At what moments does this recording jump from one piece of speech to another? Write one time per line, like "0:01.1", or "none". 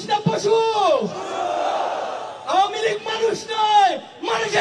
none